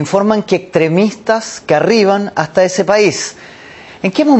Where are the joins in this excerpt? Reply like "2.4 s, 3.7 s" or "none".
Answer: 2.2 s